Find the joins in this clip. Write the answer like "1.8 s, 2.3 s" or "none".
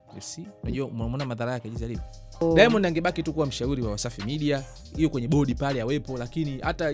2.4 s

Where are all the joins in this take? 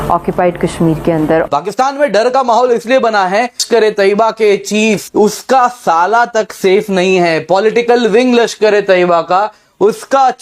1.5 s, 3.6 s, 5.1 s

